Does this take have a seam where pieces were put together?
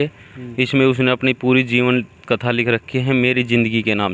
no; 0 cuts

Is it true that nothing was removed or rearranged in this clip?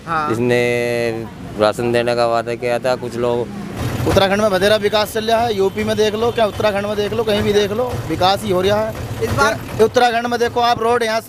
no; 1 cut; at 3.7 s

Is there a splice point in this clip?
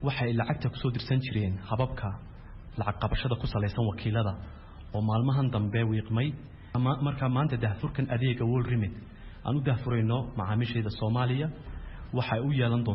yes; 1 cut; at 6.7 s

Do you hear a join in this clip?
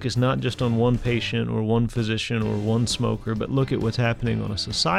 no; 0 cuts

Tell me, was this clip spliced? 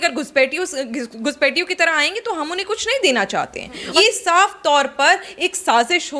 yes; 1 cut; at 3.9 s

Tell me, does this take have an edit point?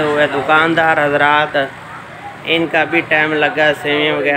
no; 0 cuts

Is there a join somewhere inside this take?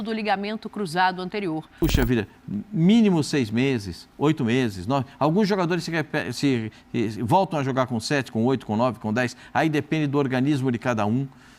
yes; 1 cut; at 1.7 s

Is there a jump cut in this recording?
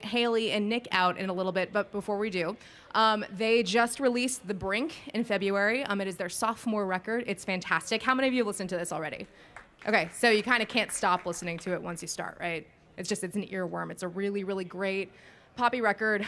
no; 0 cuts

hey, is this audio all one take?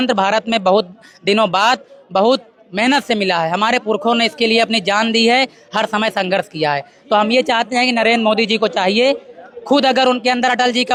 yes; 0 cuts

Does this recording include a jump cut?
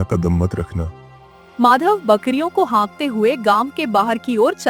no; 0 cuts

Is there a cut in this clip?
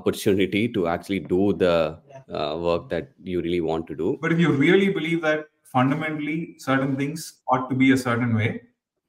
yes; 1 cut; at 4.2 s

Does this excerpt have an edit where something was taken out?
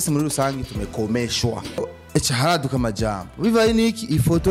yes; 1 cut; at 1.8 s

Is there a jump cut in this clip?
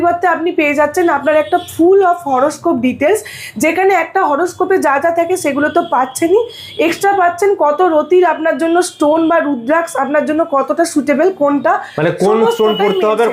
no; 0 cuts

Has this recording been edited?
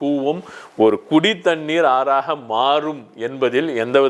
no; 0 cuts

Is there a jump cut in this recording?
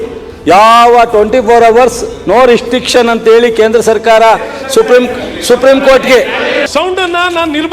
yes; 1 cut; at 6.7 s

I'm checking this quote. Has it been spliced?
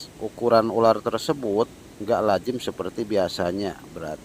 yes; 1 cut; at 1.9 s

